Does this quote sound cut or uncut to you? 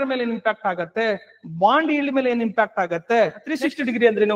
cut